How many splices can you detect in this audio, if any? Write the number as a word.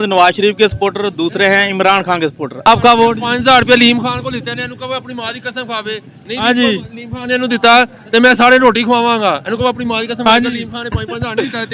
one